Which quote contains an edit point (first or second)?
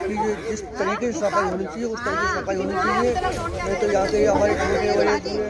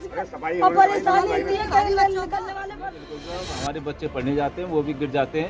second